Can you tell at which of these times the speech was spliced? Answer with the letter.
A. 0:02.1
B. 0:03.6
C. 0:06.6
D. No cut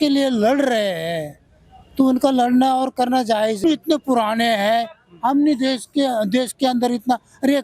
B